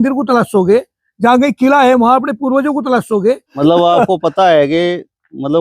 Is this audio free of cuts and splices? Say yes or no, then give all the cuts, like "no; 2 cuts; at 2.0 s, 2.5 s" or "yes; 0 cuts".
no; 1 cut; at 3.5 s